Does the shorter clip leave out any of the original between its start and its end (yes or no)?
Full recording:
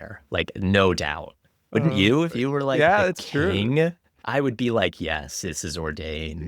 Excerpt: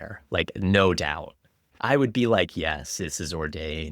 yes